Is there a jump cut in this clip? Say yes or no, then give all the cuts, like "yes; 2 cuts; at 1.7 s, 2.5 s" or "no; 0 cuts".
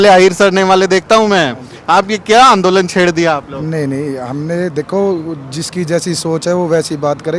no; 0 cuts